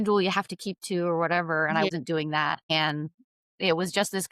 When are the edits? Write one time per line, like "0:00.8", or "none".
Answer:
0:01.9